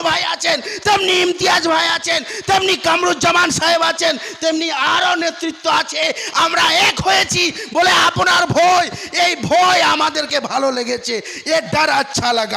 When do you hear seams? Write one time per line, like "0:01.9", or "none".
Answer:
none

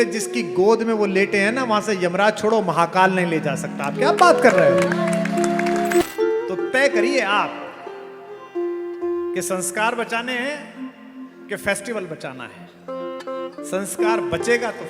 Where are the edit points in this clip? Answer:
0:06.0

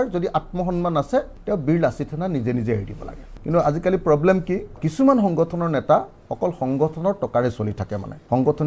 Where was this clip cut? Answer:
0:03.3
0:04.8

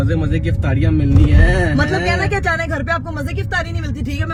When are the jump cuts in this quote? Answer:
none

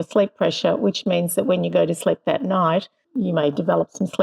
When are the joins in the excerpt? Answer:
0:03.0

